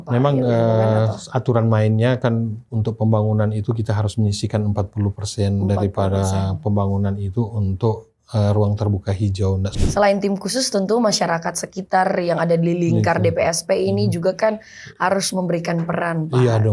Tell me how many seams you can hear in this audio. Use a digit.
1